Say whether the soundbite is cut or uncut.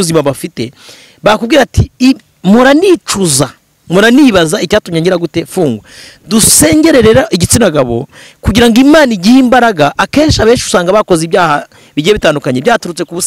uncut